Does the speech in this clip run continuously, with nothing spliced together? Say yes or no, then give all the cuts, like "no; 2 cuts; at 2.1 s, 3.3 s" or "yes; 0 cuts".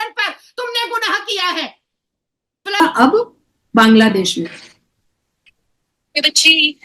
no; 1 cut; at 2.8 s